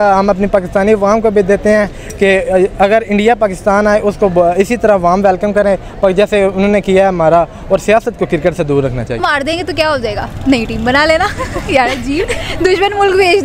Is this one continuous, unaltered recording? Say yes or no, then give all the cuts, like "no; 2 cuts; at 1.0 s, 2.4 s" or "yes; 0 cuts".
no; 1 cut; at 9.2 s